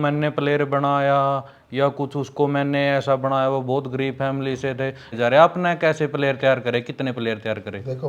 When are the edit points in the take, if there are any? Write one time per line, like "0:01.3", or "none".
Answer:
0:05.1